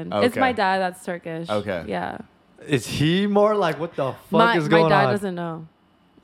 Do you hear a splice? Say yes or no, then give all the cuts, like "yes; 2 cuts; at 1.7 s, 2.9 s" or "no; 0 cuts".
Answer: no; 0 cuts